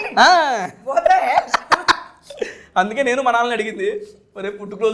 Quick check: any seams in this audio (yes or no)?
no